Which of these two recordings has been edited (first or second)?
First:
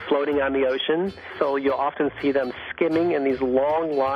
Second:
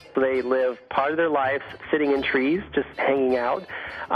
first